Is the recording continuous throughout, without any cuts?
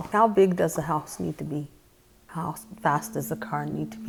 yes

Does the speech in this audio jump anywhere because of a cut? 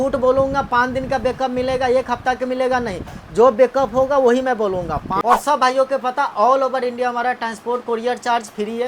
yes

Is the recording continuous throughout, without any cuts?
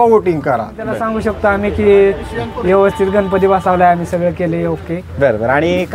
no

